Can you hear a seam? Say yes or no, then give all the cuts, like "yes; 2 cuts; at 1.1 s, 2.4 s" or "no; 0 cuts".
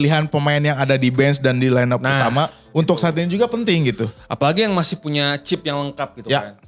no; 0 cuts